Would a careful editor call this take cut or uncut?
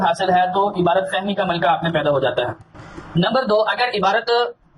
cut